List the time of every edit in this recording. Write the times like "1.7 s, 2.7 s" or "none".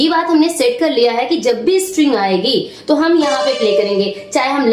none